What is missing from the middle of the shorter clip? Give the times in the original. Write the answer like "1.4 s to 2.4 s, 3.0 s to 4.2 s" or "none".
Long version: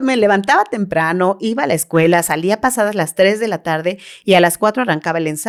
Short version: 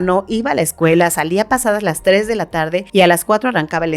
3.9 s to 4.1 s